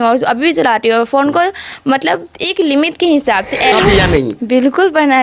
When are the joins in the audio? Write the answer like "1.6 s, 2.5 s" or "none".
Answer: 3.7 s